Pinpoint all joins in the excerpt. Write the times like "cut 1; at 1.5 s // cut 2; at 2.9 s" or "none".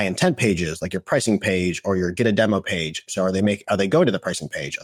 none